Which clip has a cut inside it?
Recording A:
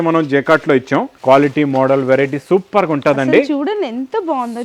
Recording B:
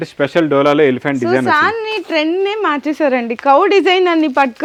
A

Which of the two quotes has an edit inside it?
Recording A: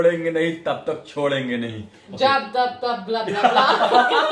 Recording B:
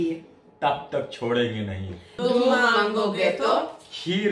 B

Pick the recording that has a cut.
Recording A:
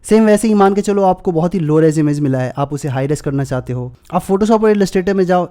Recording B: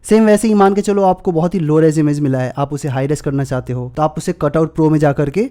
A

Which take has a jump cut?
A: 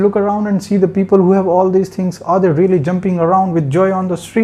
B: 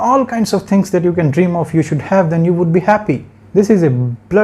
B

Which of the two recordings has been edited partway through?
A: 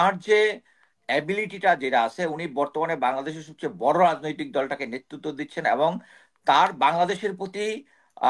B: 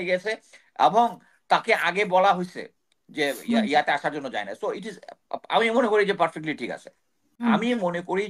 B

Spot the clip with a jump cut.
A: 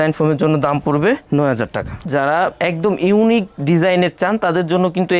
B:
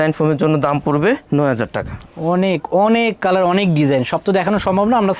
A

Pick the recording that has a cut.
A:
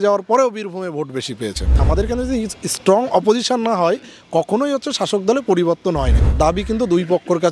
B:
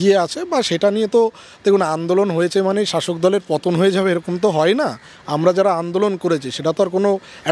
A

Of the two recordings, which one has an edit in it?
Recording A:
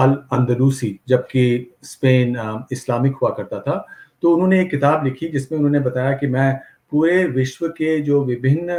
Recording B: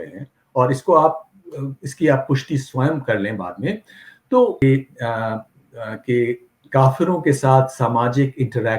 B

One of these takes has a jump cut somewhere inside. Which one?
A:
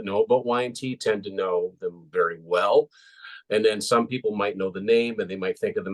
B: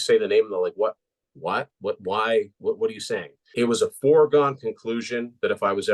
B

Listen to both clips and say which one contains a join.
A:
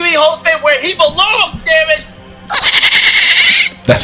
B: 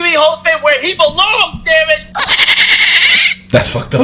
B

